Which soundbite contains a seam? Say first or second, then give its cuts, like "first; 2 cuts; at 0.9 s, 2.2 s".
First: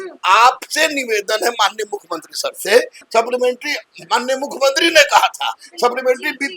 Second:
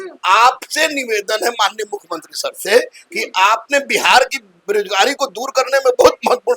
first; 1 cut; at 3.0 s